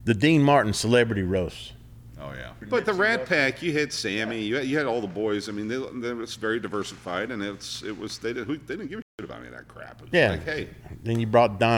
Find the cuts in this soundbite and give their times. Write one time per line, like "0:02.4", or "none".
0:02.6